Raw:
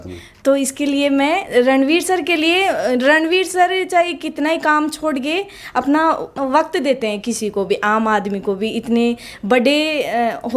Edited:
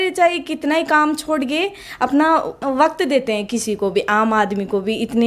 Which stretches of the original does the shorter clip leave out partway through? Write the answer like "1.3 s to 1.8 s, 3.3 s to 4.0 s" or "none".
none